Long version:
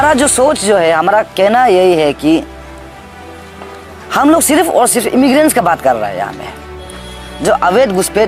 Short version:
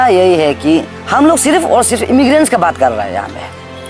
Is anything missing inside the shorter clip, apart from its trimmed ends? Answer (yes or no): yes